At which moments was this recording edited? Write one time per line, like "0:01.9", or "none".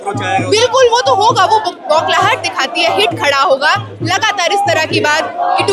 none